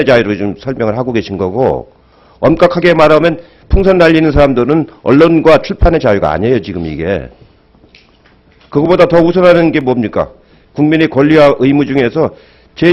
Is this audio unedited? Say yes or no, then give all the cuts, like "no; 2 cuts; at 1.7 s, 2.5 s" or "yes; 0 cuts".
no; 1 cut; at 11.6 s